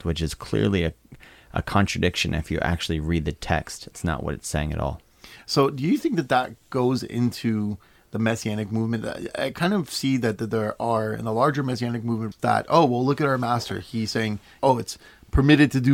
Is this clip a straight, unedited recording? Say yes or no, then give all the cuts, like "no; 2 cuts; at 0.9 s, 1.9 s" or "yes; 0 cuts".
no; 2 cuts; at 12.3 s, 14.5 s